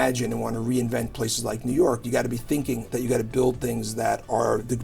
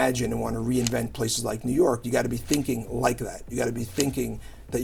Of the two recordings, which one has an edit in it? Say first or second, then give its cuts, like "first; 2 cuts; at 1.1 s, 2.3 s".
first; 1 cut; at 2.8 s